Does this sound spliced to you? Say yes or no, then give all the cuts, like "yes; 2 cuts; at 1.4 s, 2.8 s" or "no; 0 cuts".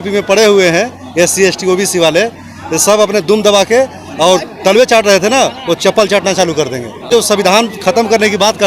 yes; 1 cut; at 7.1 s